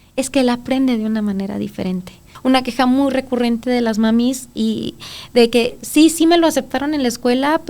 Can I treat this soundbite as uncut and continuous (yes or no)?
no